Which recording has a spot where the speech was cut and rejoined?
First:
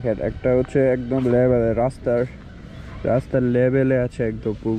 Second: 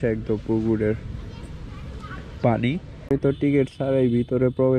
second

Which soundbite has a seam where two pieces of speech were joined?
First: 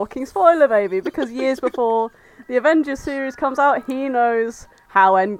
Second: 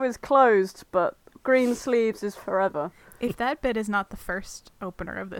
second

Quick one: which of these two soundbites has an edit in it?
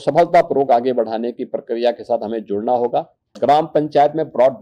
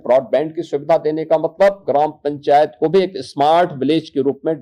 first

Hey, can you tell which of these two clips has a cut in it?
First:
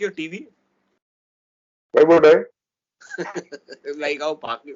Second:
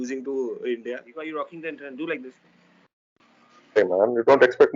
second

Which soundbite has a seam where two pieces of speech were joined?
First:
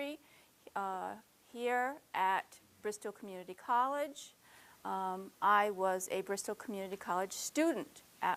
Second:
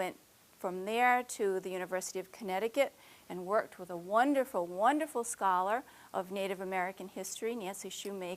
second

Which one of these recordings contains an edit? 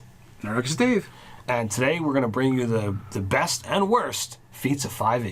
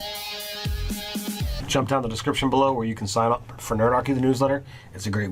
second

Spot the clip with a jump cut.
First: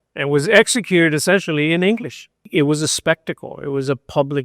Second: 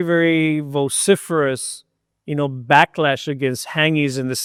first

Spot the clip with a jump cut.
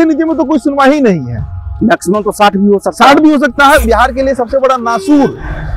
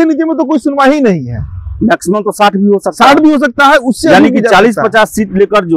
first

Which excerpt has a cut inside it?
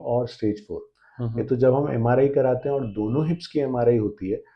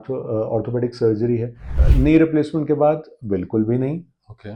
second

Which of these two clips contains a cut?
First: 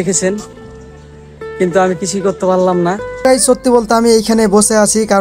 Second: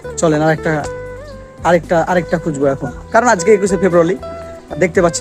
first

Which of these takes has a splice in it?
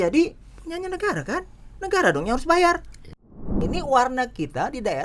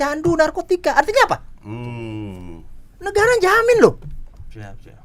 first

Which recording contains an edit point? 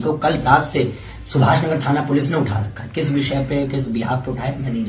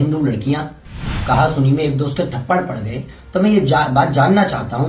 second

